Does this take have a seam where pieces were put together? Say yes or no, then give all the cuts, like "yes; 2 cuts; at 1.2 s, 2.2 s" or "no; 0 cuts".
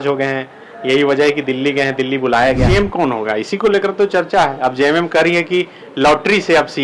yes; 1 cut; at 2.6 s